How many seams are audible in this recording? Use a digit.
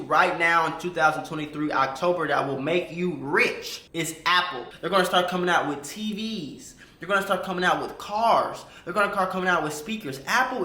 1